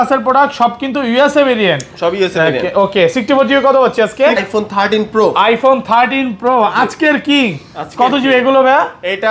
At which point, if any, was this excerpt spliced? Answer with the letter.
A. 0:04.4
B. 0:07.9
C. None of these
A